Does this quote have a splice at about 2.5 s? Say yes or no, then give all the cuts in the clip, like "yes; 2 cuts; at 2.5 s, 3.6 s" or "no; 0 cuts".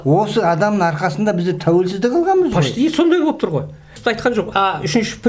no; 1 cut; at 3.9 s